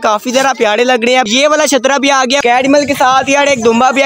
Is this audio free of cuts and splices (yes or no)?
no